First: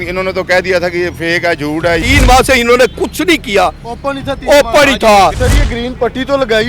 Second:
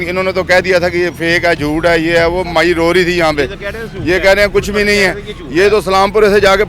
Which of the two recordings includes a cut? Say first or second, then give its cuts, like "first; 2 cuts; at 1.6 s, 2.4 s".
first; 2 cuts; at 2.0 s, 5.5 s